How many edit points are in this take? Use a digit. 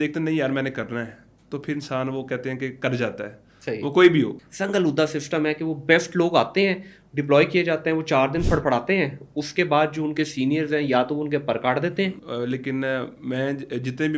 2